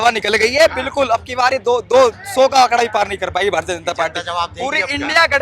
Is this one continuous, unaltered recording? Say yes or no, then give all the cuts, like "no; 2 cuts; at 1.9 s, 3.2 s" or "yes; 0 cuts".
yes; 0 cuts